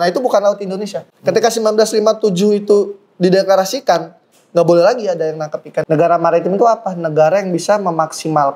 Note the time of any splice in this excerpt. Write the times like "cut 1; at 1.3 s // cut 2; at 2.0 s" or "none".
cut 1; at 1.0 s // cut 2; at 5.7 s